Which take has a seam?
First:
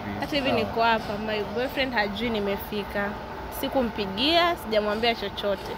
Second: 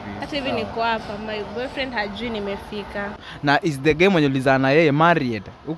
second; 1 cut; at 3.3 s

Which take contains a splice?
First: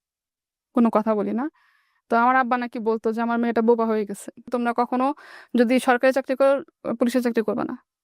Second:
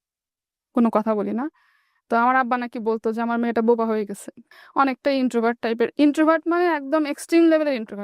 first; 1 cut; at 4.4 s

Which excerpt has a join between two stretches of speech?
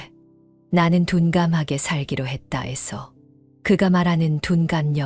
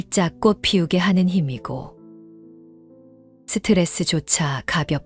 second; 2 cuts; at 1.9 s, 3.4 s

